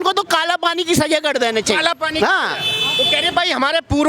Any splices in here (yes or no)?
no